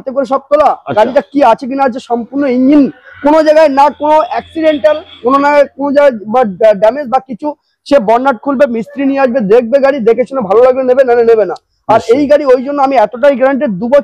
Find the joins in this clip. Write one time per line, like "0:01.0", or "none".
none